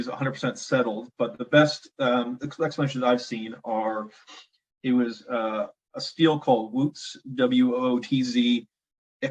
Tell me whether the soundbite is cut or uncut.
uncut